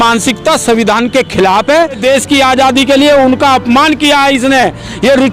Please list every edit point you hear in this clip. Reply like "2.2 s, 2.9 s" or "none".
2.0 s